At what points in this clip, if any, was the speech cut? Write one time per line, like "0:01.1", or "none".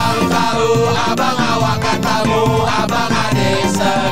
none

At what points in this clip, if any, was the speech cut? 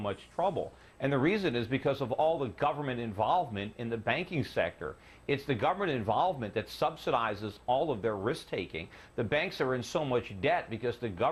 none

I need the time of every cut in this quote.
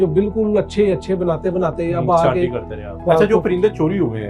0:03.0

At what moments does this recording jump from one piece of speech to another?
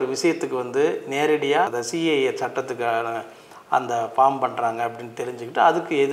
none

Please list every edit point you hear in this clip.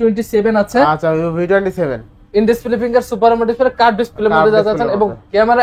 none

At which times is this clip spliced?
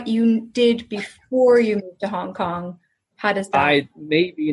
none

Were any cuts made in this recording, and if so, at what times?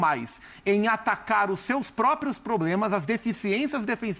none

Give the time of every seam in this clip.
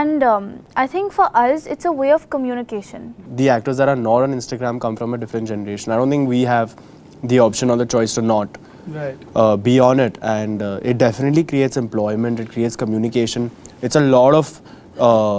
0:03.2

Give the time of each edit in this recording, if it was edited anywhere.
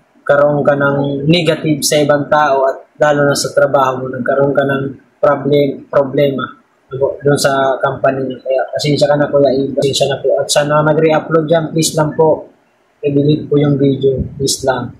0:09.8

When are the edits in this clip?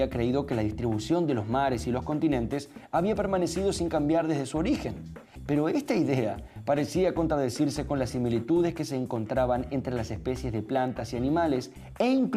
none

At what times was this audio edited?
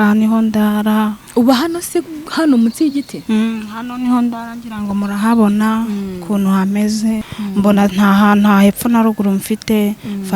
0:07.2

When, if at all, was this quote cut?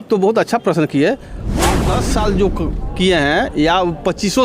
0:01.8

